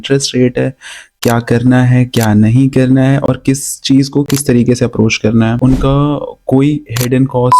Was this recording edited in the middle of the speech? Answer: yes; 1 cut; at 5.6 s

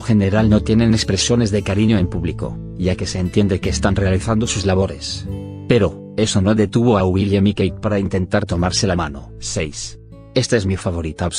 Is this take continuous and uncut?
yes; 0 cuts

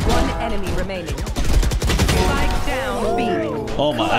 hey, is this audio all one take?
yes; 0 cuts

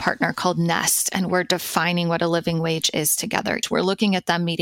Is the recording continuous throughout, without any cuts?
no; 1 cut; at 3.6 s

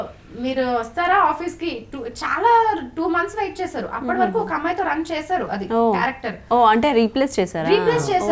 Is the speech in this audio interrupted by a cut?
no; 0 cuts

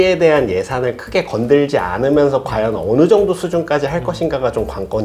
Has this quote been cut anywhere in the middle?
no; 0 cuts

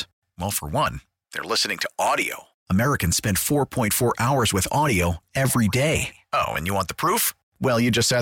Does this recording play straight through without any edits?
yes; 0 cuts

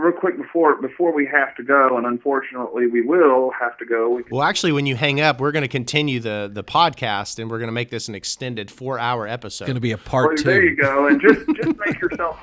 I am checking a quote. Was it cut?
yes; 1 cut; at 4.3 s

